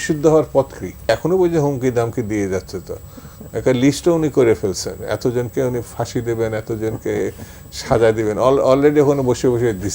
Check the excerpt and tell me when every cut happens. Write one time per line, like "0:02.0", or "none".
0:01.1

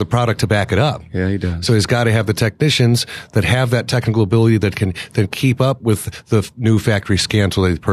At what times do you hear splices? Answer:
none

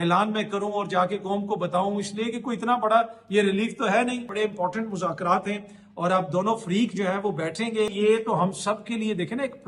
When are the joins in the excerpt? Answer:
0:04.3
0:07.9

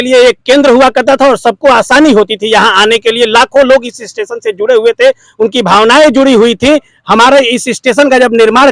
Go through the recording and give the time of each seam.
none

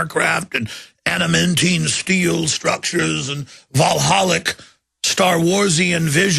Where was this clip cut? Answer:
0:01.9

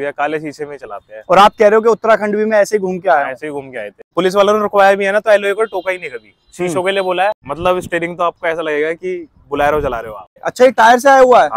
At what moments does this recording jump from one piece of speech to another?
0:04.1
0:07.5
0:10.4

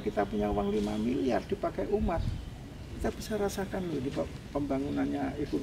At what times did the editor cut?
none

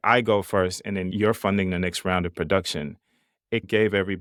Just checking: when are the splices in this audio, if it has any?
none

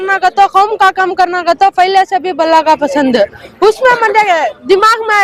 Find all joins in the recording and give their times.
none

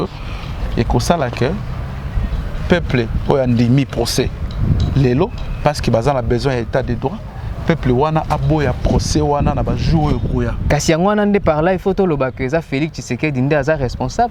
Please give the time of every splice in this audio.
0:10.6

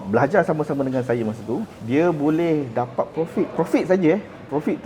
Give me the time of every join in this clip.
0:01.8
0:03.5

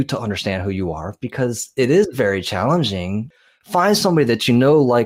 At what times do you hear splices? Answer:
0:03.3

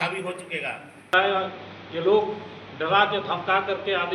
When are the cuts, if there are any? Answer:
0:01.1

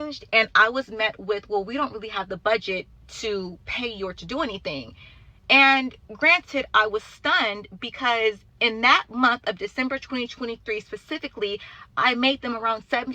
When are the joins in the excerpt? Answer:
none

